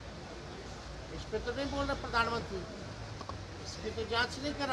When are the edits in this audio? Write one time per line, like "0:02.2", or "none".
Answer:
none